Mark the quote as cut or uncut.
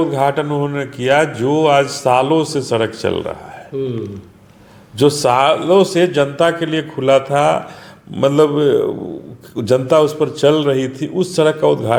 uncut